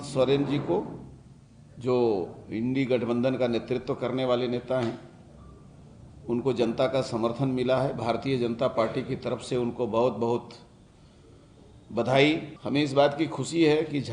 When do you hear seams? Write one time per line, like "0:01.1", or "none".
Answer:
0:12.5